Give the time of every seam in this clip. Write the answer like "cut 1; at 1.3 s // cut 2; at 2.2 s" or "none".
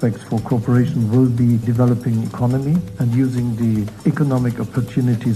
cut 1; at 1.6 s // cut 2; at 2.9 s // cut 3; at 3.9 s